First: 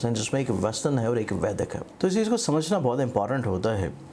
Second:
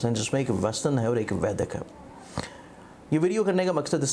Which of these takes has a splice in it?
first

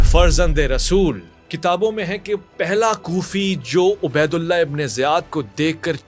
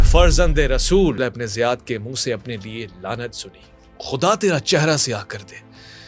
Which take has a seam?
second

